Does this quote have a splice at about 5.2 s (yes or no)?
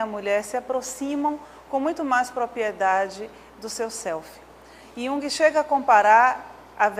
yes